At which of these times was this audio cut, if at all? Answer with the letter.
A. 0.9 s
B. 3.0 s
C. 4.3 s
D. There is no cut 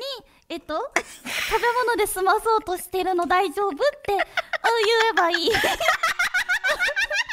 D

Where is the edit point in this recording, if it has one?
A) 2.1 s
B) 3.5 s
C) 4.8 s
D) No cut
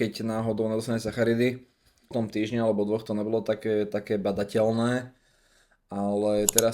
A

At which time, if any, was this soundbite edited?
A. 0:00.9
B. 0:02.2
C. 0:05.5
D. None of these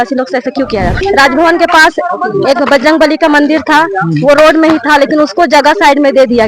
A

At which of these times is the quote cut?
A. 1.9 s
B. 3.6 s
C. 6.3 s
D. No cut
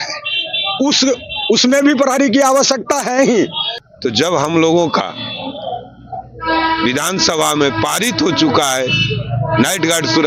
B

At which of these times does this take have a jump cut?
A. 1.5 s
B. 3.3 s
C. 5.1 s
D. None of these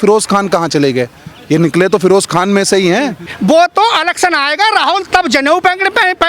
B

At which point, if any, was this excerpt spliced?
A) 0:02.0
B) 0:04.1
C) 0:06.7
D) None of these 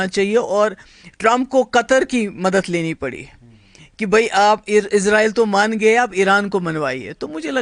D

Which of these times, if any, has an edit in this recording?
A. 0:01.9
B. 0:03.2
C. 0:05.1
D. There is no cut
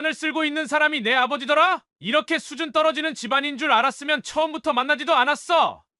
A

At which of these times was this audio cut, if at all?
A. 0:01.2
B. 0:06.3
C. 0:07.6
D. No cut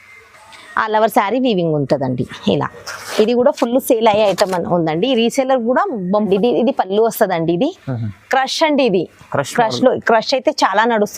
B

